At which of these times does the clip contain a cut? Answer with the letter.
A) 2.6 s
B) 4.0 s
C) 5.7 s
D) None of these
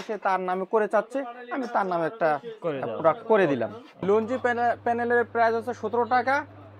B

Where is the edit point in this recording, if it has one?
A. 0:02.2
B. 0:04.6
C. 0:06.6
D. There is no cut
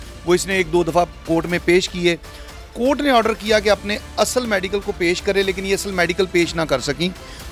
D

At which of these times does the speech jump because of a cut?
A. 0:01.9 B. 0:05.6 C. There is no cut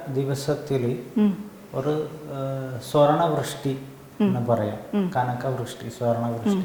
C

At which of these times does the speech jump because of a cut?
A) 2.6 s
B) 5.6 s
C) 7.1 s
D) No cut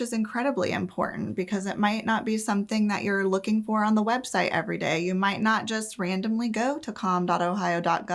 D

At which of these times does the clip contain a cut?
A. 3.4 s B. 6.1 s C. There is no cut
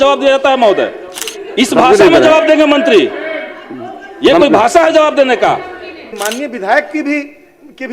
B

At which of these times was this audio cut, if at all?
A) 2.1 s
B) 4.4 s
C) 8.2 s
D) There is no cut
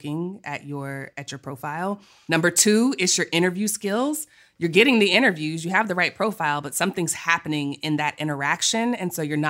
A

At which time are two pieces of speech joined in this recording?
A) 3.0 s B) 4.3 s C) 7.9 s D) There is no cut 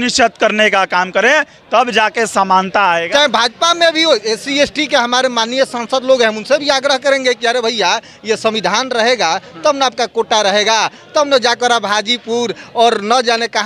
A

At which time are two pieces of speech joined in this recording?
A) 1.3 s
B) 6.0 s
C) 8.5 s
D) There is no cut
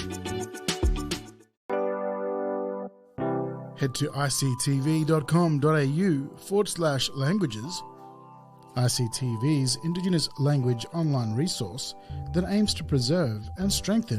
A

